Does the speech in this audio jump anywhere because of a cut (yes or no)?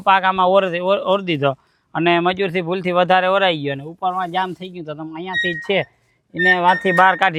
no